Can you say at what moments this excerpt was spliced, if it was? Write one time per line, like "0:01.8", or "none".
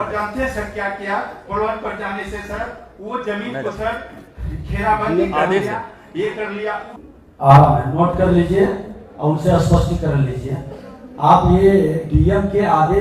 0:07.0